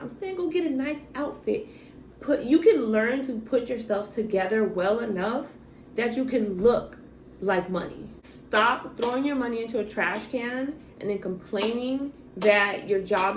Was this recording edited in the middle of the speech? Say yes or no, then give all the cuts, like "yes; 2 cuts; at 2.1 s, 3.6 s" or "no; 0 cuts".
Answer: no; 0 cuts